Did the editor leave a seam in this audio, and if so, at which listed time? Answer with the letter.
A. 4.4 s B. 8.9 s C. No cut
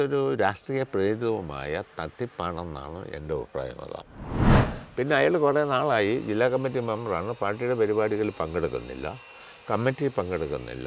A